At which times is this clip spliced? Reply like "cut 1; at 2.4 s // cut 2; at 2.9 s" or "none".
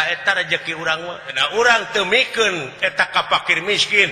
cut 1; at 1.4 s